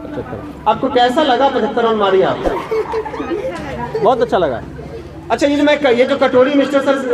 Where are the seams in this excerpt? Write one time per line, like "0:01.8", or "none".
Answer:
0:06.1